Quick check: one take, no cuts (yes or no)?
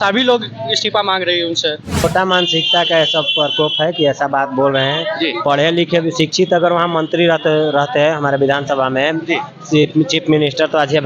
no